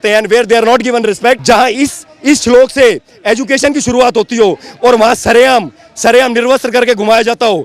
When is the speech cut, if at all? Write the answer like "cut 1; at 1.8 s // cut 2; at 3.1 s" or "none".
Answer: cut 1; at 1.4 s